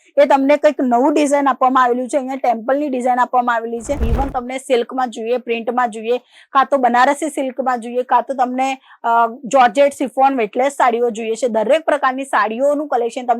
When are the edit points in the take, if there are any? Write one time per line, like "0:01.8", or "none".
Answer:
0:04.1